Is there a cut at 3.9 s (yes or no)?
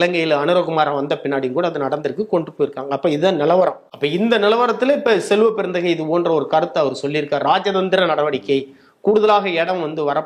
yes